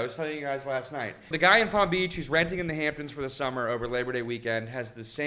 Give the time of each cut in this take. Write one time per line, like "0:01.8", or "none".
0:01.3

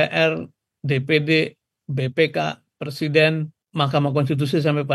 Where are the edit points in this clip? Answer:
0:03.6

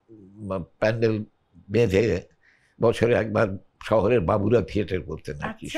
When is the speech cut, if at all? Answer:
none

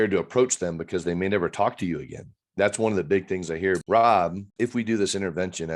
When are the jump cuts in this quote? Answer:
0:03.8
0:04.4

